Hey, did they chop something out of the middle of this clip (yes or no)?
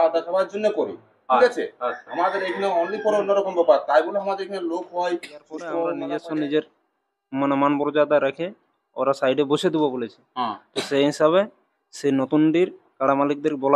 yes